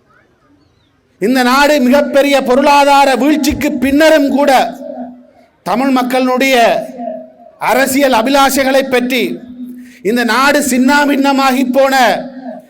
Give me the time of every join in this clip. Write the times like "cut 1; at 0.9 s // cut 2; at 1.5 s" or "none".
none